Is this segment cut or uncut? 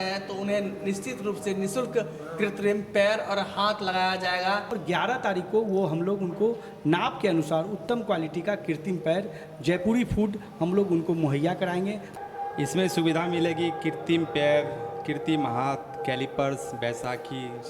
cut